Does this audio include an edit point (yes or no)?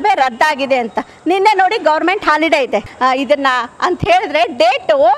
yes